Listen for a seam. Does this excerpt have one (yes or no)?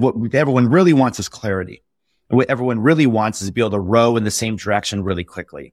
no